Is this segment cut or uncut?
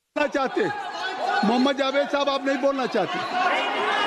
uncut